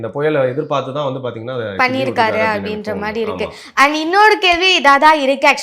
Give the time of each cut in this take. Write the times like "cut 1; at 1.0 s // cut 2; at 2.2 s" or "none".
none